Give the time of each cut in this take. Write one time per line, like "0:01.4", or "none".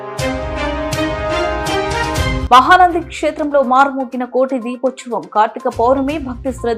none